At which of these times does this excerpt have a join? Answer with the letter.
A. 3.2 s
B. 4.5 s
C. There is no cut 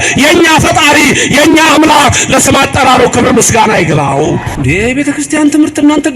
B